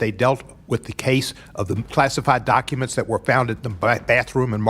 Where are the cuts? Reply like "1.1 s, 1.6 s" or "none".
1.9 s